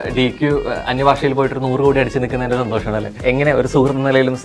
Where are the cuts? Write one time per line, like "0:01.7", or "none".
0:03.1